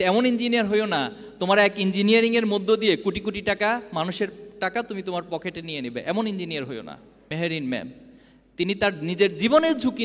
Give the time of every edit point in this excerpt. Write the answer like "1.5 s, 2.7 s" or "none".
7.1 s